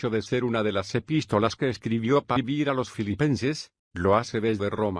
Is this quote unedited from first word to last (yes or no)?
yes